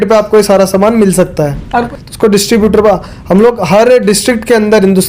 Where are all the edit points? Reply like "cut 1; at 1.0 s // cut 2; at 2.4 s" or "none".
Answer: cut 1; at 1.9 s